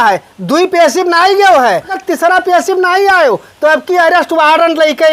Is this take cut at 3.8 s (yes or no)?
no